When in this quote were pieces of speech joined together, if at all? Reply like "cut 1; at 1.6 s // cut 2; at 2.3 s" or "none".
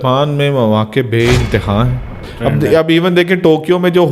cut 1; at 2.3 s